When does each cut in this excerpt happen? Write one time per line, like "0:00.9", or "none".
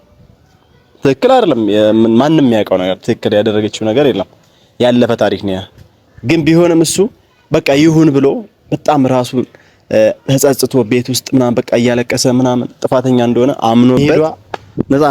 0:14.0